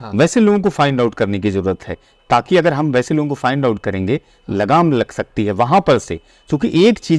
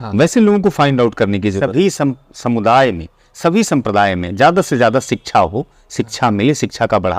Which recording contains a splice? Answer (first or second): second